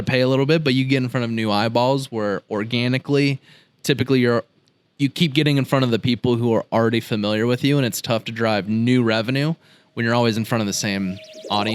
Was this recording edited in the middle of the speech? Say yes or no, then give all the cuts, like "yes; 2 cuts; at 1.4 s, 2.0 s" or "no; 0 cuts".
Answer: no; 0 cuts